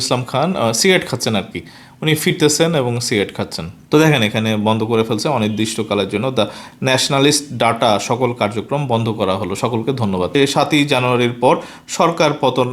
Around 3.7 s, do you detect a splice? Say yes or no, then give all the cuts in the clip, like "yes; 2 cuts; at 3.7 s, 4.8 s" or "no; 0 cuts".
yes; 2 cuts; at 3.7 s, 10.3 s